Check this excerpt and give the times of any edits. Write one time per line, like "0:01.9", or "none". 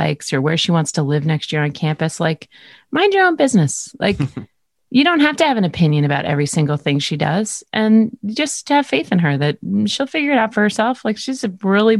none